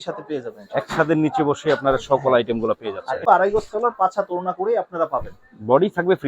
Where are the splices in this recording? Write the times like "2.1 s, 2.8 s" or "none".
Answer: 3.3 s

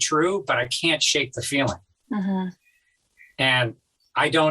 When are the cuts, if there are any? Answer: none

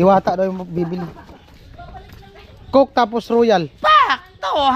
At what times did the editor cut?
none

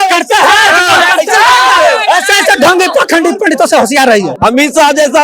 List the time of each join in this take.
4.3 s

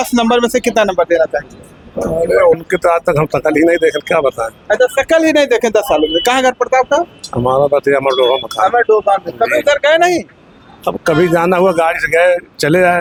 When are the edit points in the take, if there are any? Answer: none

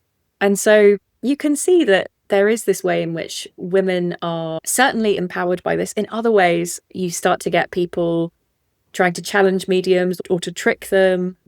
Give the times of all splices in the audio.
2.2 s, 5.2 s, 6.8 s

